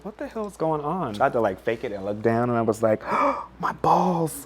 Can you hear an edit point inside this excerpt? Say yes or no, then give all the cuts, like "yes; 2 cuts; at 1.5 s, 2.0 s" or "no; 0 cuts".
yes; 1 cut; at 1.1 s